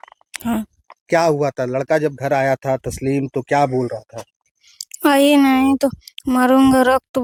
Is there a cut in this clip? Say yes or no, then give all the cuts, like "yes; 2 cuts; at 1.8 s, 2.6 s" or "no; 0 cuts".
no; 0 cuts